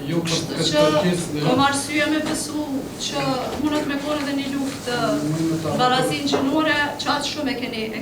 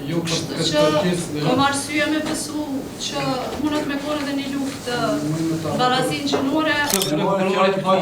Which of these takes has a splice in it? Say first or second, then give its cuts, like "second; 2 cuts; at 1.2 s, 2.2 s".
second; 1 cut; at 6.9 s